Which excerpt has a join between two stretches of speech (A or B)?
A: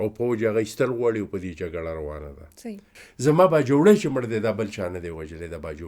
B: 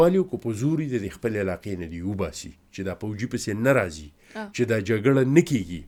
A